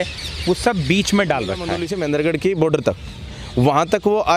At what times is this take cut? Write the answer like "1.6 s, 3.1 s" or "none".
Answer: 1.8 s